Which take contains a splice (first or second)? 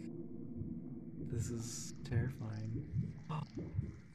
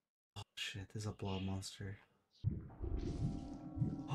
second